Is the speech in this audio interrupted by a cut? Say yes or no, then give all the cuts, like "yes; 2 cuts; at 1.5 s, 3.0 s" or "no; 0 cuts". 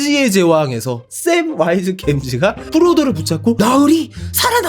yes; 1 cut; at 1.0 s